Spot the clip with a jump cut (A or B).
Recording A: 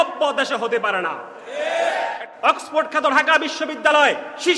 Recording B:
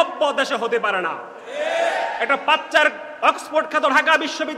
A